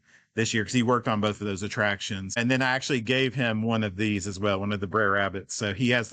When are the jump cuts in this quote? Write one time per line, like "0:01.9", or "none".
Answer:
0:02.4